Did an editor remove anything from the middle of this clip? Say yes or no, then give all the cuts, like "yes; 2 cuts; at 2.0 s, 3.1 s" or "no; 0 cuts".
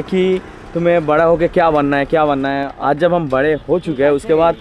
yes; 1 cut; at 2.7 s